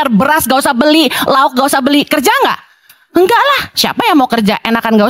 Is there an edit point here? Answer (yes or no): no